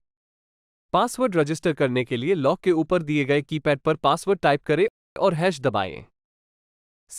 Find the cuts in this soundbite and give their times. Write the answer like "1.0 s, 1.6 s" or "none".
5.0 s